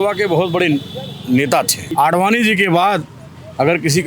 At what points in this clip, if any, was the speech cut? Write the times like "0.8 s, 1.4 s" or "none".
1.8 s